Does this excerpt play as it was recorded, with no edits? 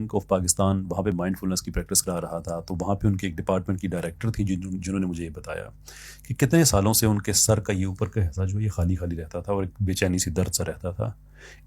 no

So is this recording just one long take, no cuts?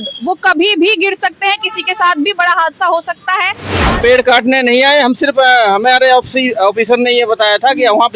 no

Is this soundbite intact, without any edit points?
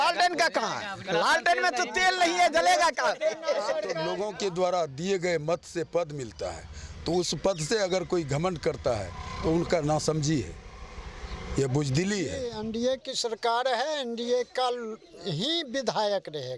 no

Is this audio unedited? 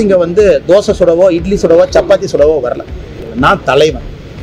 no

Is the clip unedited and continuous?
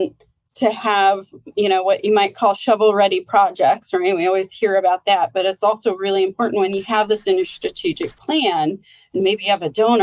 yes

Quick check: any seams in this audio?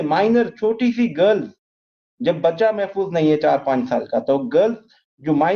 no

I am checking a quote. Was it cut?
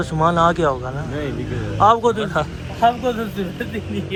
no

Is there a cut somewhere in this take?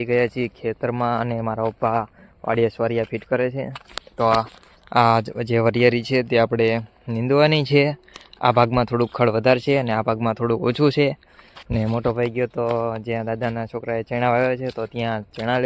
no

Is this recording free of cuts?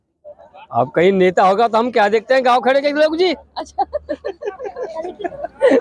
yes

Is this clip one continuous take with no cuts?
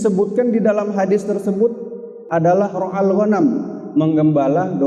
yes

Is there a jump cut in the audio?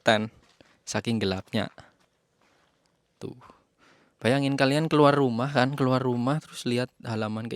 no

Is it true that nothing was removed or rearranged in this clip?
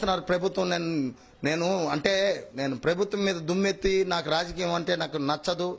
yes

